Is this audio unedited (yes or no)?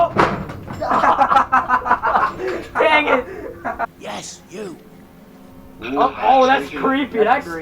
no